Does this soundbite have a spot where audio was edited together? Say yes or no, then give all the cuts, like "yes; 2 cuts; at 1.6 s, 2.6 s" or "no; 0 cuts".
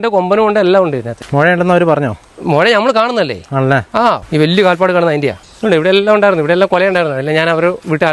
yes; 3 cuts; at 1.2 s, 4.2 s, 5.5 s